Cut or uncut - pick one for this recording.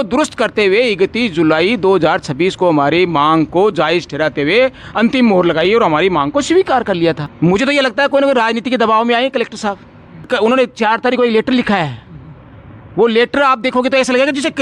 cut